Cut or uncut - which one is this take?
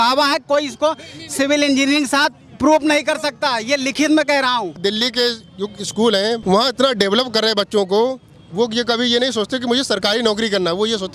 cut